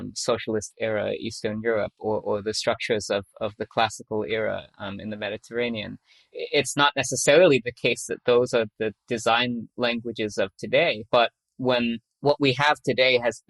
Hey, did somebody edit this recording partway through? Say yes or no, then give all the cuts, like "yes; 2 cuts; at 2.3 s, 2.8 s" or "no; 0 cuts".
no; 0 cuts